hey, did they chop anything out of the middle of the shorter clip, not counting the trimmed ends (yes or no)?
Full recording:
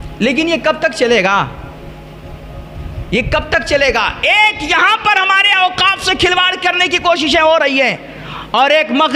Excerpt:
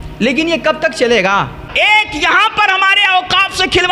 yes